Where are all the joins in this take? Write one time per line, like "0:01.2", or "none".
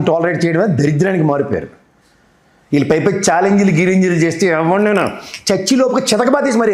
none